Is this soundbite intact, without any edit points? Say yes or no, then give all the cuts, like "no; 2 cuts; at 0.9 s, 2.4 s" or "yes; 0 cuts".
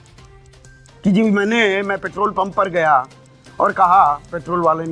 no; 1 cut; at 1.0 s